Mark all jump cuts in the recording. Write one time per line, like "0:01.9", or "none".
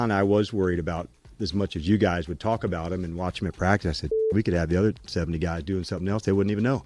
none